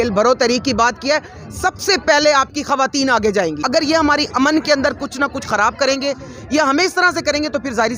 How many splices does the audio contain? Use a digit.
1